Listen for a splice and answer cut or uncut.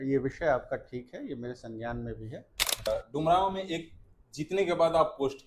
cut